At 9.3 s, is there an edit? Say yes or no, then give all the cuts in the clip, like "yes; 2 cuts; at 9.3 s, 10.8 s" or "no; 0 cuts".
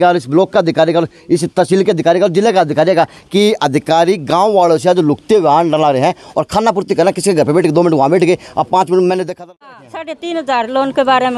yes; 1 cut; at 9.3 s